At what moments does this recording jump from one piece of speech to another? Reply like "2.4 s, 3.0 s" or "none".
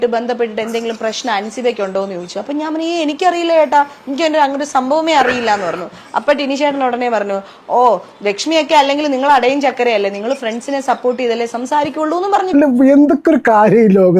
12.5 s